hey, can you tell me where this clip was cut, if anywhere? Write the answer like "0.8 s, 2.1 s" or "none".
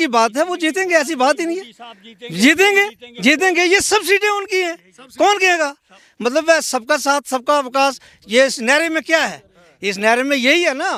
none